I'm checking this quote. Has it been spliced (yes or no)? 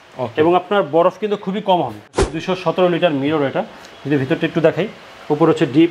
yes